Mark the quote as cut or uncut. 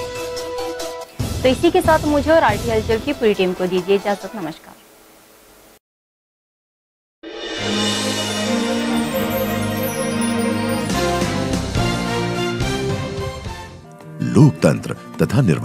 uncut